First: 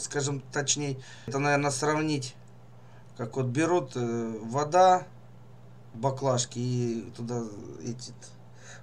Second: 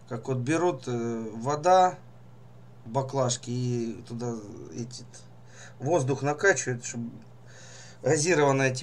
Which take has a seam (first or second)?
first